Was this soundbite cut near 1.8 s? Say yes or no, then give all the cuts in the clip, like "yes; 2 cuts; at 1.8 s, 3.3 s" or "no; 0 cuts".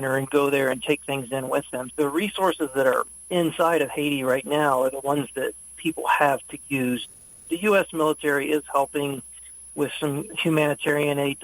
yes; 3 cuts; at 1.8 s, 7.0 s, 10.3 s